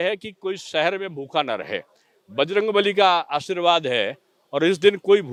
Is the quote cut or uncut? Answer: uncut